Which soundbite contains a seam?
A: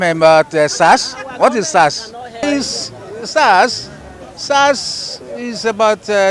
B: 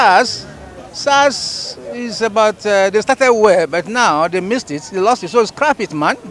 A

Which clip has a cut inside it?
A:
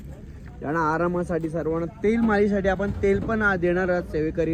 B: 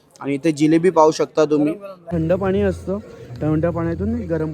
B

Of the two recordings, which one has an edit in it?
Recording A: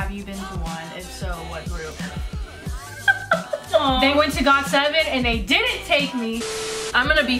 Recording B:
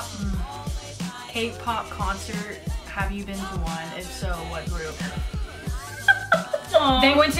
A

